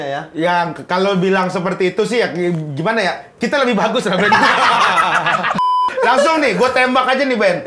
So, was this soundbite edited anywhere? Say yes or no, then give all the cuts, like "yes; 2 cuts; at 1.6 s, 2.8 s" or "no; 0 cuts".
yes; 1 cut; at 5.9 s